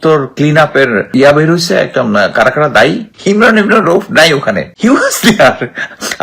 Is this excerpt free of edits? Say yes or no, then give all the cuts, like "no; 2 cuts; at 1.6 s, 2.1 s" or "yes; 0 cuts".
no; 3 cuts; at 1.1 s, 3.1 s, 4.7 s